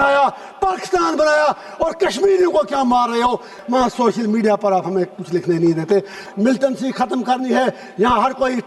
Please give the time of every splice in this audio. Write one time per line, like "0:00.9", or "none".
0:03.5
0:06.2